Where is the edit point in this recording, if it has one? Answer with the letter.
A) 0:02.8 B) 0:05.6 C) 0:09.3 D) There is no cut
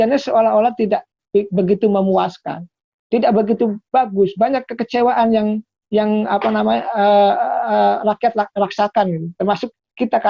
D